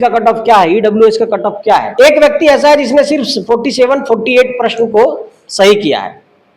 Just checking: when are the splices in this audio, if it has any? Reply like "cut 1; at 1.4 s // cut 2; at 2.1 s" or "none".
cut 1; at 1.9 s